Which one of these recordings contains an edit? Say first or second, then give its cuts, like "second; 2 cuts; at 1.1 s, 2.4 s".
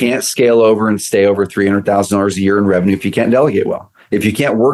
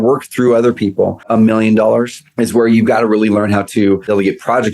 second; 3 cuts; at 1.2 s, 2.2 s, 3.7 s